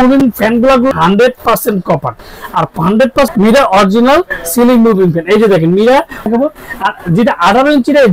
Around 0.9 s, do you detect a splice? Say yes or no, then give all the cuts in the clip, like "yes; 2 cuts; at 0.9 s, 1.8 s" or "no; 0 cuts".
yes; 3 cuts; at 0.9 s, 3.3 s, 6.3 s